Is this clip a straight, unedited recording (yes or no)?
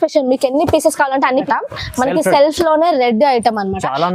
no